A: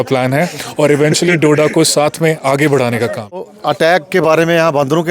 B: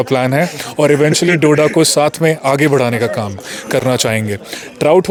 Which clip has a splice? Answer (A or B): A